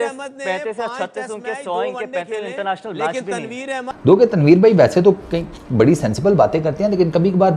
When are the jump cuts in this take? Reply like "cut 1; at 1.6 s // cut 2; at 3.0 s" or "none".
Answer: cut 1; at 3.9 s